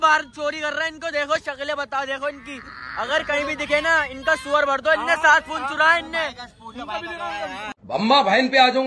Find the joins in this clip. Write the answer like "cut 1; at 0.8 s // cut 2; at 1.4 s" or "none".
none